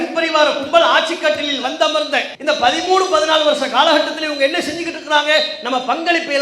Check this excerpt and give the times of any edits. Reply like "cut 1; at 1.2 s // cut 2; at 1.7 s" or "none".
cut 1; at 2.3 s